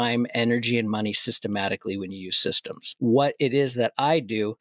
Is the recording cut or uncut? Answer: cut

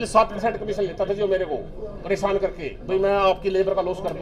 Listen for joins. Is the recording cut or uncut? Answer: uncut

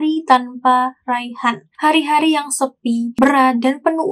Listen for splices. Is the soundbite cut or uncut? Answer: uncut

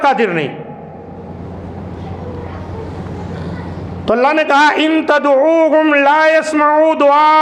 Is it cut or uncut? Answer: uncut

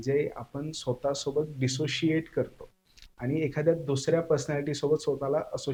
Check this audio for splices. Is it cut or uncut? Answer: uncut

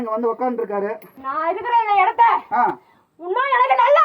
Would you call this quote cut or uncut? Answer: cut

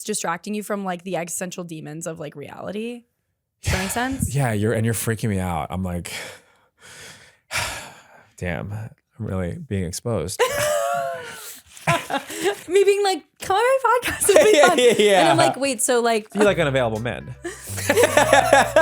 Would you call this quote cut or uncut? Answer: cut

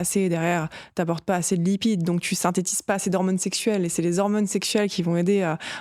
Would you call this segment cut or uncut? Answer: uncut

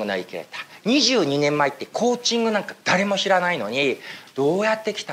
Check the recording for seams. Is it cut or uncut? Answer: uncut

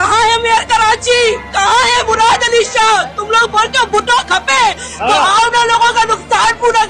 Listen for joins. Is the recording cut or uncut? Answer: uncut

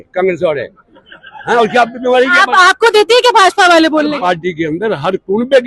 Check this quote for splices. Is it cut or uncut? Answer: cut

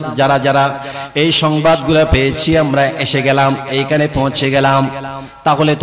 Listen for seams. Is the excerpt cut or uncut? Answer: uncut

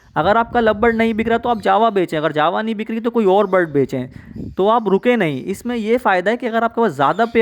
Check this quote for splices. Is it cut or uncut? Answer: uncut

